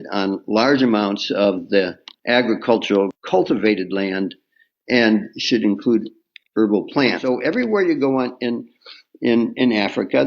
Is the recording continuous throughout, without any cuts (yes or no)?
no